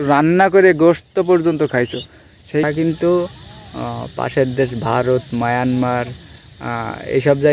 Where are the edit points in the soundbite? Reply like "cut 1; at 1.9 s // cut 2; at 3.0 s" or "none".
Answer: cut 1; at 2.6 s